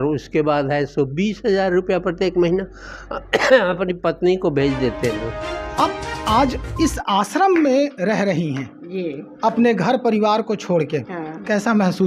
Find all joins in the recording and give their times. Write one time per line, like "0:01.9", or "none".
0:05.8